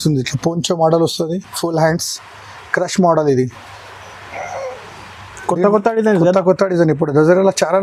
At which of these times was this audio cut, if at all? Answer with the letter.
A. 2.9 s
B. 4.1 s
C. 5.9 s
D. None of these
D